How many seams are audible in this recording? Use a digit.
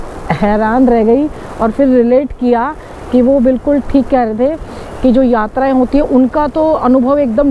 0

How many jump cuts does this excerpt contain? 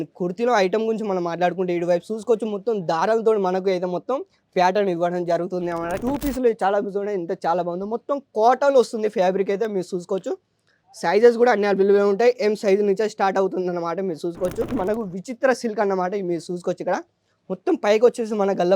2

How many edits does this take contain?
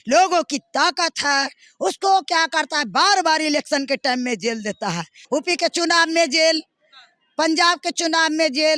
1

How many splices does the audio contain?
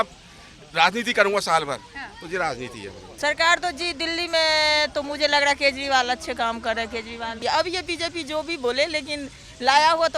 2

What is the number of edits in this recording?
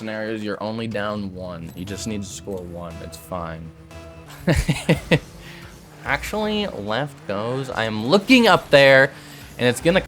1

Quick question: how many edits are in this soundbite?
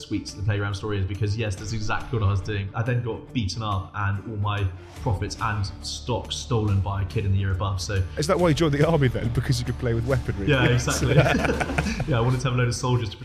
2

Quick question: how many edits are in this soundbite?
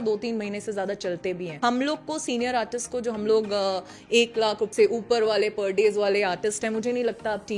2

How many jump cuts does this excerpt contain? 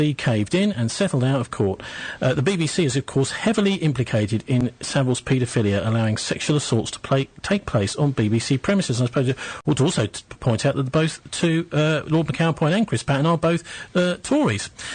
1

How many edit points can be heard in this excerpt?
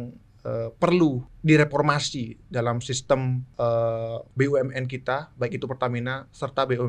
3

